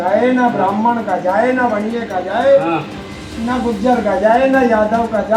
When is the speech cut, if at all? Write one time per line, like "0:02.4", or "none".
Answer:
none